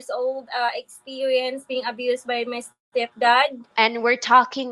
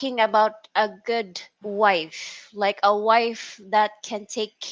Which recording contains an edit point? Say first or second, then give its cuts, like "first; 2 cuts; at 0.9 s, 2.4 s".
first; 1 cut; at 3.6 s